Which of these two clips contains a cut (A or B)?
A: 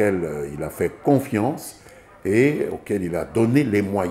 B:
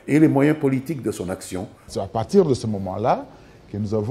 B